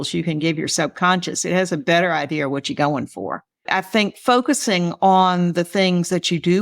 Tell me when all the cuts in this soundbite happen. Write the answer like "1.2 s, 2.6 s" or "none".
3.6 s